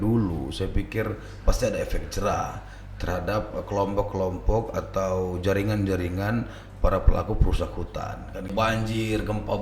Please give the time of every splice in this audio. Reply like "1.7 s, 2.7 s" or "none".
8.5 s

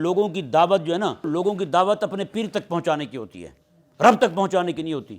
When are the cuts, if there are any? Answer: 1.3 s

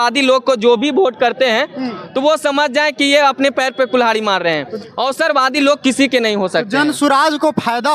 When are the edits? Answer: none

